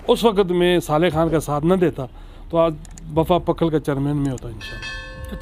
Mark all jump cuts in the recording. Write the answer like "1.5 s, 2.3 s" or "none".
none

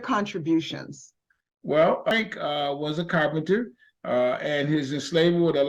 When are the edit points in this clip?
2.1 s

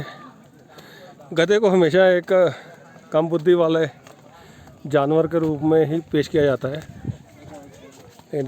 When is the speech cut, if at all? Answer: none

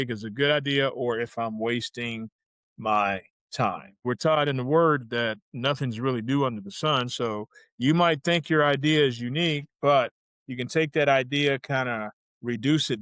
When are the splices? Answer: 4.0 s

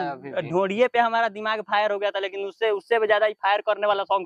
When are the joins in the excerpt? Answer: none

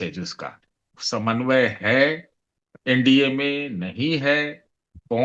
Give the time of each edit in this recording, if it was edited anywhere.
1.0 s

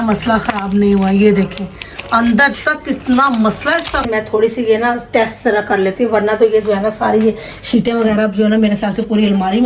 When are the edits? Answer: 4.1 s

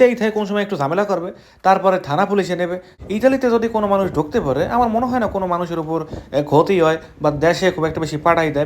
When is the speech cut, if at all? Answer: 2.9 s

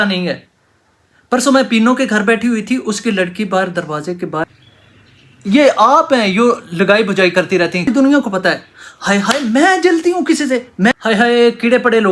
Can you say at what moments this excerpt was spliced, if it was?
4.4 s, 7.9 s, 11.0 s

